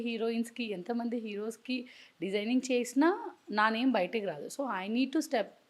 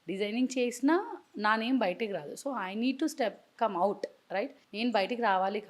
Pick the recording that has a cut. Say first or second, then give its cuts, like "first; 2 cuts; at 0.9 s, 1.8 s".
second; 1 cut; at 4.6 s